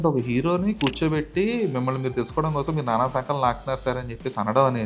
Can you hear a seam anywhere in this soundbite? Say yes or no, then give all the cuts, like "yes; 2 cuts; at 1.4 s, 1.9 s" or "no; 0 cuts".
no; 0 cuts